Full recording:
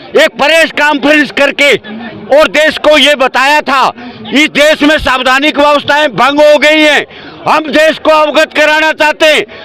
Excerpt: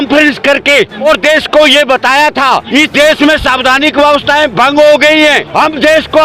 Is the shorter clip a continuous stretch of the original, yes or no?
no